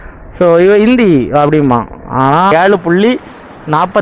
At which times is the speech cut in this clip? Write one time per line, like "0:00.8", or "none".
0:02.5

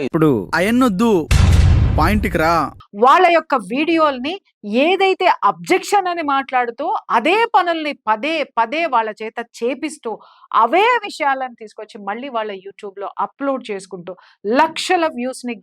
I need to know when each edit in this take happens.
0:02.8

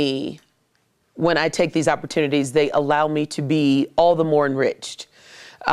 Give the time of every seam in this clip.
0:03.9

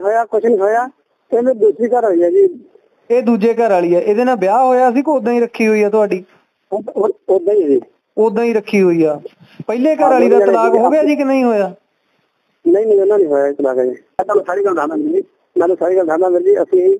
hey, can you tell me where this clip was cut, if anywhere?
0:14.2

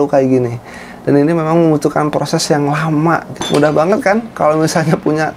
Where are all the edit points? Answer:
0:03.3

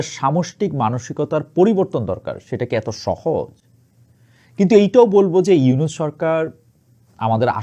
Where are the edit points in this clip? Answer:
none

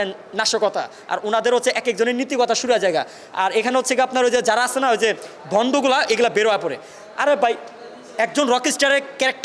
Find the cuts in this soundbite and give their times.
none

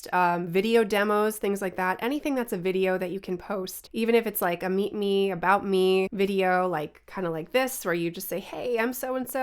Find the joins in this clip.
0:03.8
0:06.1

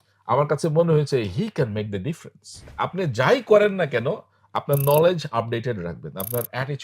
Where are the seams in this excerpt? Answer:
0:02.7

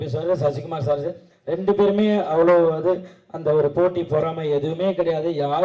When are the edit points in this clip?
none

